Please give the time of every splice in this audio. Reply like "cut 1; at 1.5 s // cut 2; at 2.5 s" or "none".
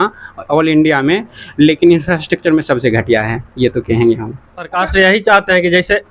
cut 1; at 4.7 s